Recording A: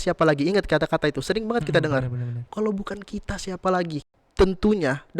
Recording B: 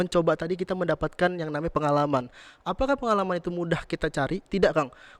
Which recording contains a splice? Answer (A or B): A